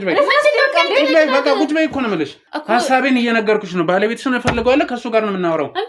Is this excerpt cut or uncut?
cut